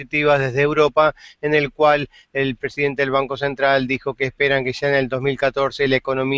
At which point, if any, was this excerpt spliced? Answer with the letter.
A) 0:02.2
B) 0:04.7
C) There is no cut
B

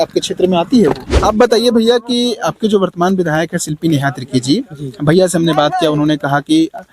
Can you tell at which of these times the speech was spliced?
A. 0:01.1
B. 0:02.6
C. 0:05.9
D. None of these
A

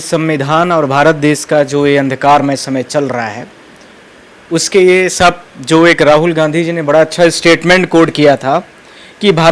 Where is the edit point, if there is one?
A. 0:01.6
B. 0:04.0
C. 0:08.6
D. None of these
D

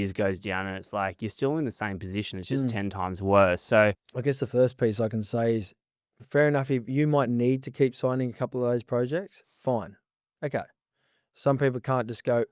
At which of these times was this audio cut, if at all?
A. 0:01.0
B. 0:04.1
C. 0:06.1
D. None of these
B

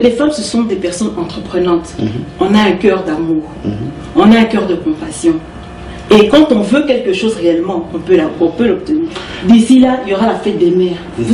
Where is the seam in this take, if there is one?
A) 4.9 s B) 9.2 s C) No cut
B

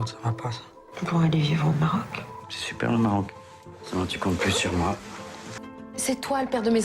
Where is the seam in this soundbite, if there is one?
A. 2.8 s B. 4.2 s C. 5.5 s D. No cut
C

